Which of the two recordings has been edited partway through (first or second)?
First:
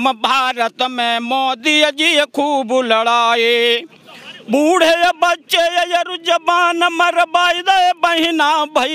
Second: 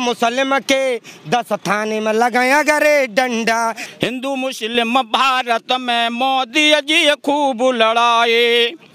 second